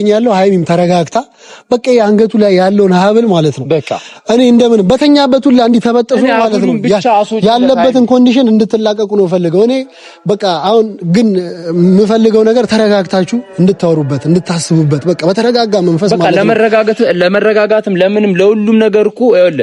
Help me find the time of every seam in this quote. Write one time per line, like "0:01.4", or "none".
none